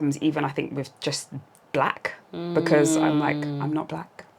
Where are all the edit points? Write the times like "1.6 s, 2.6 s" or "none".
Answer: none